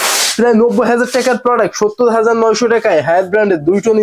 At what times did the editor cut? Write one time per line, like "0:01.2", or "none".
none